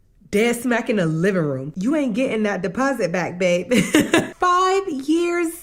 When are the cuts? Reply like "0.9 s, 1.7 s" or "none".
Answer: 1.7 s, 4.3 s